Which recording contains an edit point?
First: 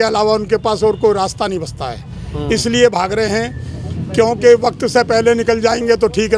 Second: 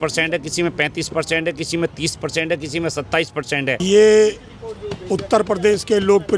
second; 1 cut; at 3.8 s

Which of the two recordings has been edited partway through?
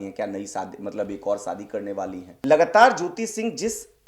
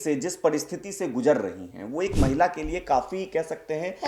first; 1 cut; at 2.3 s

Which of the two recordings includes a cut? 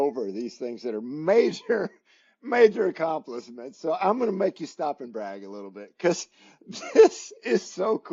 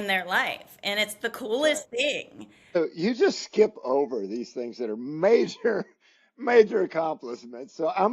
second; 1 cut; at 2.8 s

